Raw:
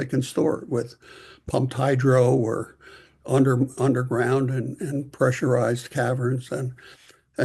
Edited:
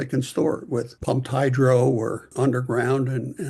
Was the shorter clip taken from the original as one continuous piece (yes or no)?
no